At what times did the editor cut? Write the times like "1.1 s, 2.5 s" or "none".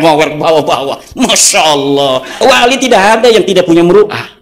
2.3 s